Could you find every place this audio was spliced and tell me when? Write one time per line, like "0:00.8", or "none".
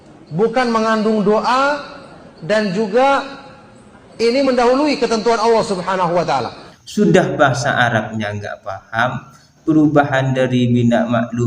0:06.6